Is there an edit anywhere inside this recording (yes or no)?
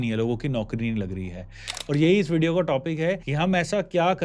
yes